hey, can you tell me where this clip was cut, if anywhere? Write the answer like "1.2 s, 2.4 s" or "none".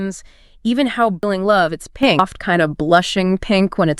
1.2 s, 2.2 s